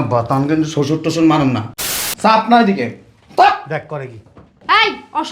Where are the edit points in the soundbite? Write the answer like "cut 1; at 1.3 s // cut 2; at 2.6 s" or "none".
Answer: cut 1; at 1.8 s